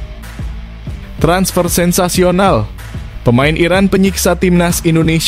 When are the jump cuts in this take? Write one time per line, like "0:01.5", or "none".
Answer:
0:01.2